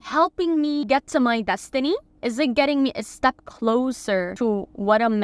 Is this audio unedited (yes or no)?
no